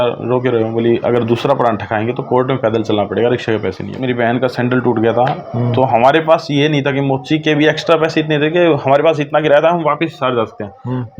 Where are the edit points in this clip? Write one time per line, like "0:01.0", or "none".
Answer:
0:03.9